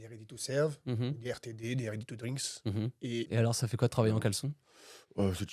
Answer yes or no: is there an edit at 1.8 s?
no